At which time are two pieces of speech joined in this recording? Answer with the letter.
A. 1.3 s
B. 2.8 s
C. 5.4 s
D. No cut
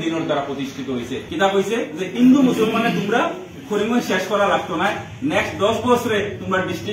A